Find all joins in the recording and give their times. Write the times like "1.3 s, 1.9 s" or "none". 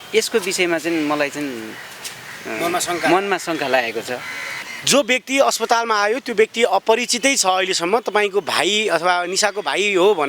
none